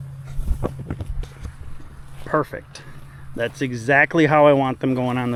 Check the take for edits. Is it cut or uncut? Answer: uncut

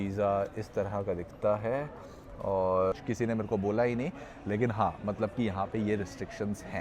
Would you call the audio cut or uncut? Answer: cut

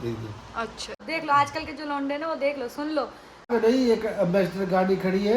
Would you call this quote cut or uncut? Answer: cut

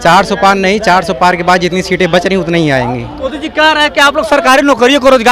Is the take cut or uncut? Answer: cut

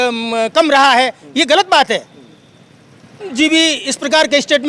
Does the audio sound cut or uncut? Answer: cut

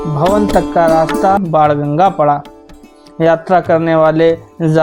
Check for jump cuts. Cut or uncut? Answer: cut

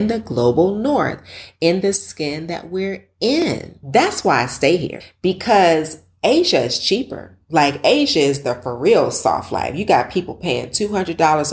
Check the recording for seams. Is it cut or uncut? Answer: cut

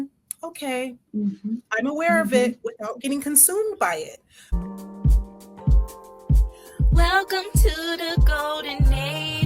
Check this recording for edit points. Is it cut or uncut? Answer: cut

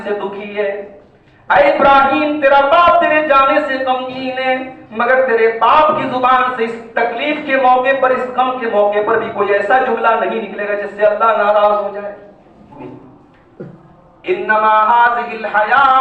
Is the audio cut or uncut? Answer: cut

